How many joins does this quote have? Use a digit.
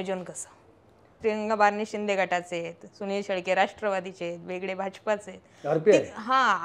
1